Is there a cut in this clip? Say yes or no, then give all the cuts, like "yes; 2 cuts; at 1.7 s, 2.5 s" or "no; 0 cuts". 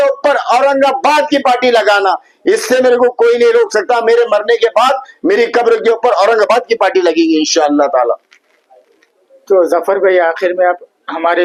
no; 0 cuts